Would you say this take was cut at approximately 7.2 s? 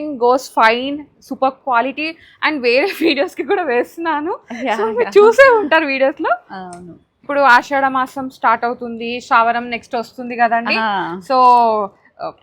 yes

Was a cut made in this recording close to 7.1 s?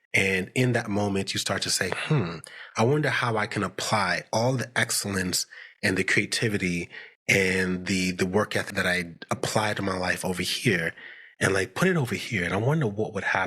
no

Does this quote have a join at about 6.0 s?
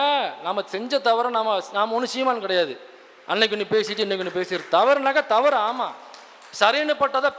no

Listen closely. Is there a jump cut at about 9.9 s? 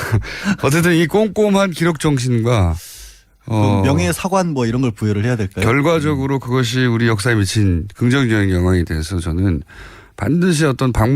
no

